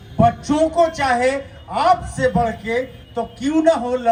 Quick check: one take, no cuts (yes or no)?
yes